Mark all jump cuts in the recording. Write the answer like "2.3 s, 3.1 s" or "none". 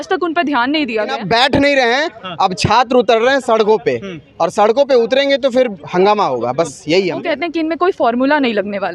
1.2 s, 7.2 s